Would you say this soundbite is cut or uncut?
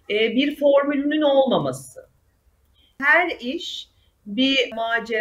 uncut